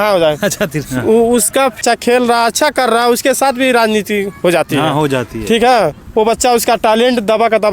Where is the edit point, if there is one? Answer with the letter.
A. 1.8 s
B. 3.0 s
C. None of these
A